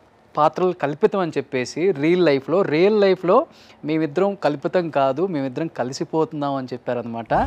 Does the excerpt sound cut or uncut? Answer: uncut